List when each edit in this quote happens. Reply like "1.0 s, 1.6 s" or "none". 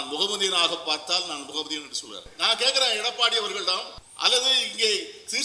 2.3 s, 4.0 s

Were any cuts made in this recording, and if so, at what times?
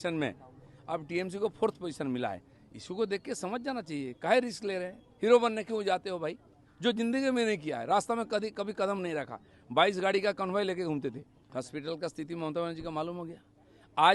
11.3 s

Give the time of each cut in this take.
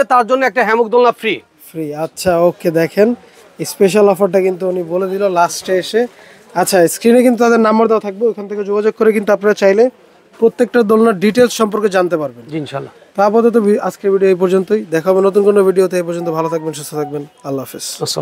none

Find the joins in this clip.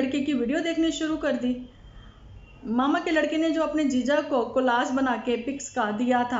none

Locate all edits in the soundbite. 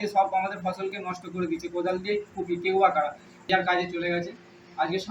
3.3 s

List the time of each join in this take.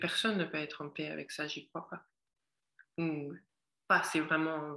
none

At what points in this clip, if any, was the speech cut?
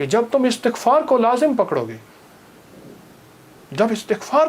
none

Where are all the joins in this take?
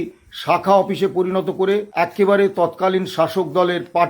1.9 s

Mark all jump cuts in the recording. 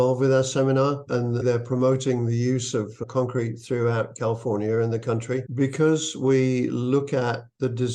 1.4 s, 5.4 s

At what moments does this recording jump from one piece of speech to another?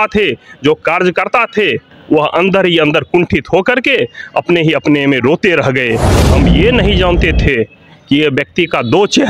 6.1 s

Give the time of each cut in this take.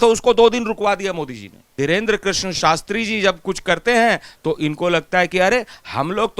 1.7 s

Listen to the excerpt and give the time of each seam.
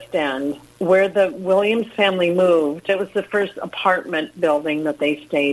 2.9 s

